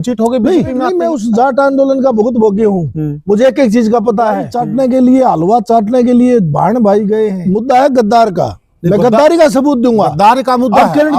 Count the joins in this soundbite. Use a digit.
3